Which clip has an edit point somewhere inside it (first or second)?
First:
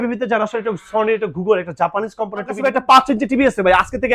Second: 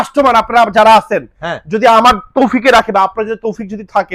first